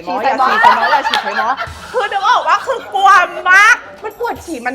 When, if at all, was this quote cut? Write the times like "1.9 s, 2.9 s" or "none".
none